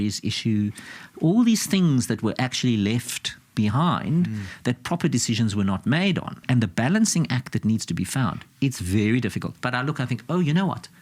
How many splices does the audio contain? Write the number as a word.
two